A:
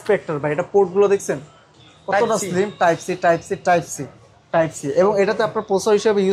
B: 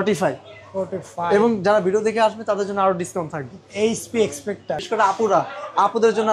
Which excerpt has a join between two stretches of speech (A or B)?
B